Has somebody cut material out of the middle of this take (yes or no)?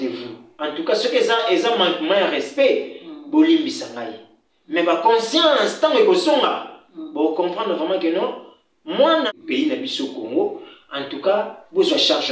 yes